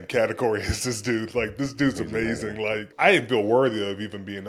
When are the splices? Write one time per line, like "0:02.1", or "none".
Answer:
0:02.9